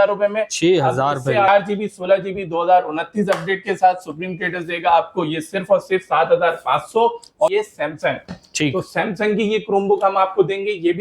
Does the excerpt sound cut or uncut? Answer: cut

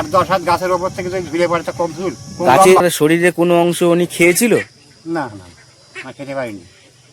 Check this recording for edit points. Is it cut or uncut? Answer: cut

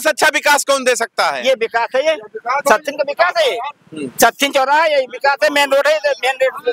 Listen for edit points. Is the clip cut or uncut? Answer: uncut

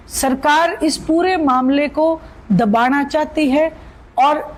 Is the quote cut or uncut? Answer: uncut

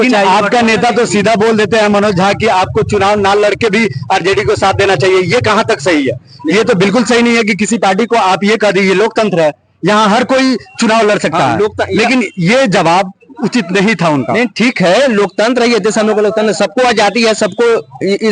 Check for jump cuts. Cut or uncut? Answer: uncut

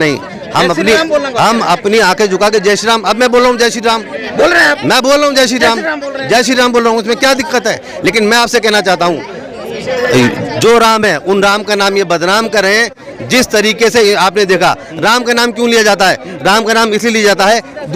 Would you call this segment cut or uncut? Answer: uncut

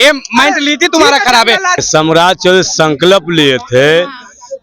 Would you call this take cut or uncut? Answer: cut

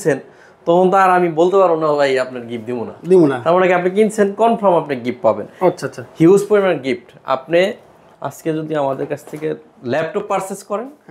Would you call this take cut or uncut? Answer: uncut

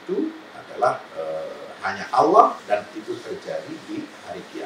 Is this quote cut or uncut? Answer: cut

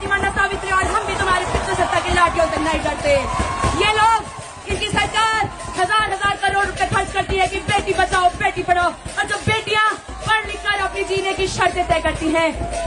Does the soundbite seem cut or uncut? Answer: uncut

